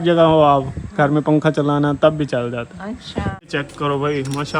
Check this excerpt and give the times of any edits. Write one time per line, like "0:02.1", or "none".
0:03.4